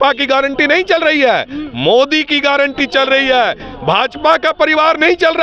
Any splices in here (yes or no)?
no